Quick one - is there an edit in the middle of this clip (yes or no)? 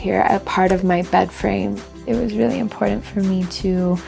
yes